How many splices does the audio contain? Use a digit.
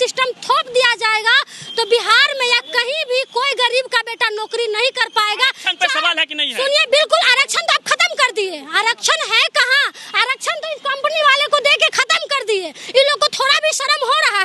0